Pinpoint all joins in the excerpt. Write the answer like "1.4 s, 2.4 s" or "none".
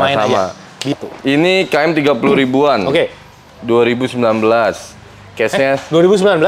0.9 s

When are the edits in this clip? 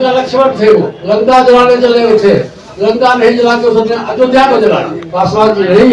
1.0 s, 5.0 s

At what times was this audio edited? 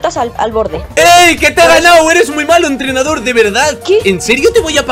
0.9 s

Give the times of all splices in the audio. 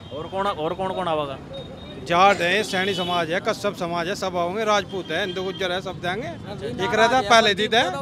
none

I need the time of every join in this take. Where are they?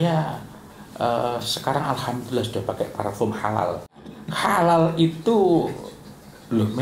4.2 s

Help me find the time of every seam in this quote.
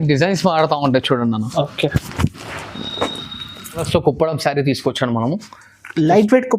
3.8 s

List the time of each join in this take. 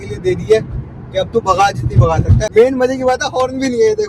2.4 s

